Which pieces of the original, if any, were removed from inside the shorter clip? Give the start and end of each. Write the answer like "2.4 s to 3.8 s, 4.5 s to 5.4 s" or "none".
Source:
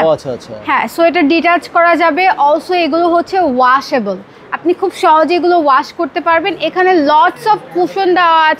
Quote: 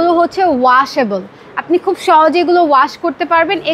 none